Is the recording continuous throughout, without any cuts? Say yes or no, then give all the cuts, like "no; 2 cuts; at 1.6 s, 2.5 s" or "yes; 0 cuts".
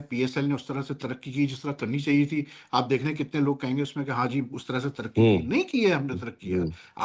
yes; 0 cuts